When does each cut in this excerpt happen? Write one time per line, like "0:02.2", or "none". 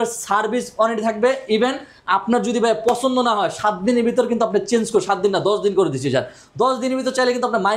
none